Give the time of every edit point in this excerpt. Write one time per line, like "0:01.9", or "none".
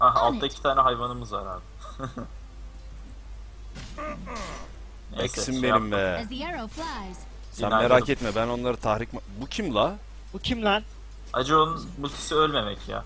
0:11.6